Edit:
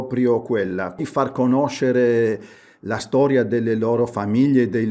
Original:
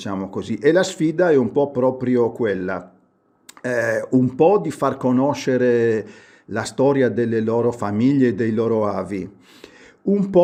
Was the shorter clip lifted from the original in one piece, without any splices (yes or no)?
no